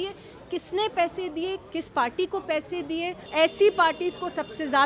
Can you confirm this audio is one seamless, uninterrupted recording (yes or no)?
no